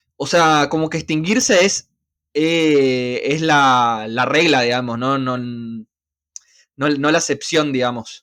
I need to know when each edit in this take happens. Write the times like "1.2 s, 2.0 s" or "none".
none